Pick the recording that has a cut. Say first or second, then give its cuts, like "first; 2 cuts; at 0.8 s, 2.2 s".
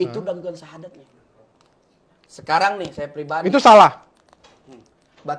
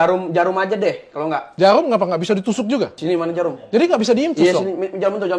second; 2 cuts; at 1.5 s, 3.0 s